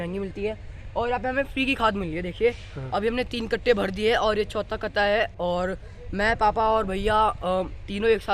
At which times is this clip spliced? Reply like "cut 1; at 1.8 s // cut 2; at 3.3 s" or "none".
none